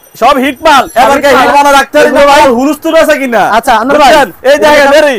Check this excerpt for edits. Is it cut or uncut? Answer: cut